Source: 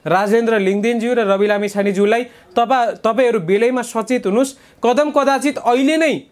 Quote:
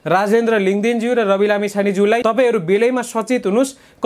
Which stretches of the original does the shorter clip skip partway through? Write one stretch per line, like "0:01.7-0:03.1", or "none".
0:02.2-0:03.0